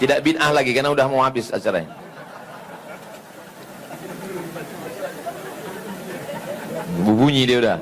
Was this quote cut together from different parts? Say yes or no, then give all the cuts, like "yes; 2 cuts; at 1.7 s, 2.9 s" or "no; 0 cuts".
no; 0 cuts